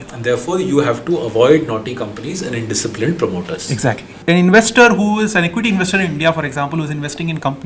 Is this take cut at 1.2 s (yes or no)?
no